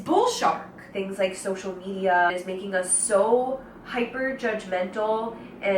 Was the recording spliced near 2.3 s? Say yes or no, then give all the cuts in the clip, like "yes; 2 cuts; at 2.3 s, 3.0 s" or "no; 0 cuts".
yes; 2 cuts; at 0.9 s, 2.3 s